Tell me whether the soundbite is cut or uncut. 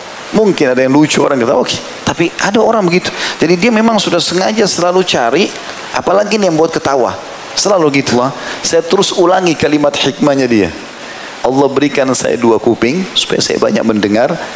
cut